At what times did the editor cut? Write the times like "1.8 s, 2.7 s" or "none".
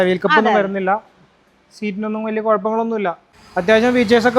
3.3 s

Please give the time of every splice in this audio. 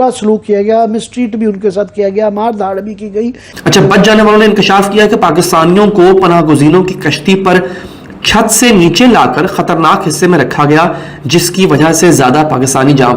3.4 s

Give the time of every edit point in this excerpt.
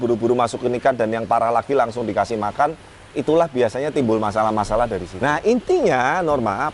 5.1 s

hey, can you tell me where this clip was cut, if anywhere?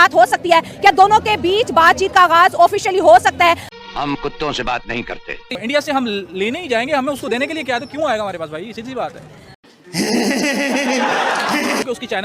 5.6 s

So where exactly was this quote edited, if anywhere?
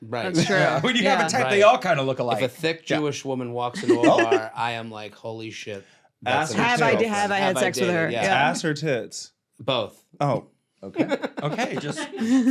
none

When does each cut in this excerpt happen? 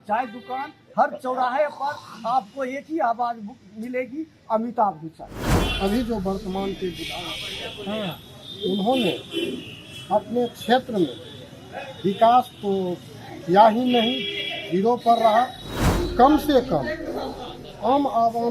5.6 s

